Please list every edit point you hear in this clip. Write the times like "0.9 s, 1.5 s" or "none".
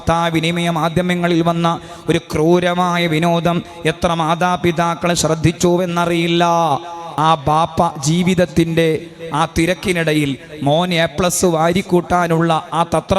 7.0 s